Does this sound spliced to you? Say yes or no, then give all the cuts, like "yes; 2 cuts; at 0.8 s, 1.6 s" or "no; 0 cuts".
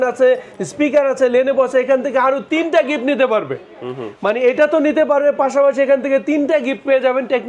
no; 0 cuts